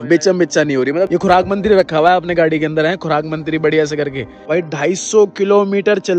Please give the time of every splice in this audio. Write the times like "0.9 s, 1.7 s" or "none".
1.1 s, 4.5 s